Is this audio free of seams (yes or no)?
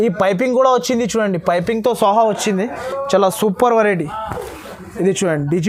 yes